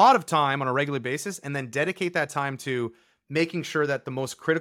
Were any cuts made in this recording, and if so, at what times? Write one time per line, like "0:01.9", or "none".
none